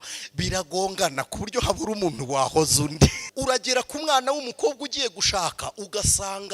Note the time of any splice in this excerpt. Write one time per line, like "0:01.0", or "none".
0:03.2